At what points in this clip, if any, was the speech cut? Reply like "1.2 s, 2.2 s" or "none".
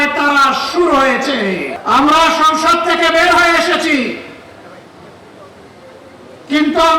1.7 s